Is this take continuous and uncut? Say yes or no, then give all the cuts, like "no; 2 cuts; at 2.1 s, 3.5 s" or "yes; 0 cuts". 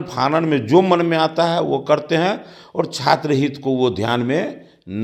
yes; 0 cuts